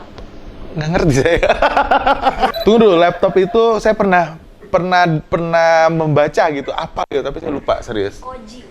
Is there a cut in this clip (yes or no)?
yes